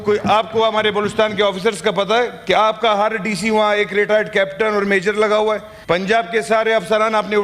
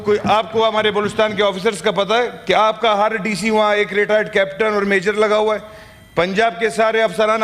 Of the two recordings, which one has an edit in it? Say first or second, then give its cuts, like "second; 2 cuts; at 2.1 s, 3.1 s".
first; 1 cut; at 5.7 s